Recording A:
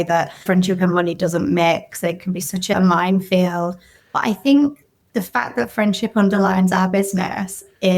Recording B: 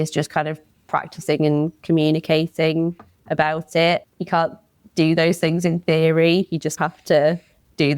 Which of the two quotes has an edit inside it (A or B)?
B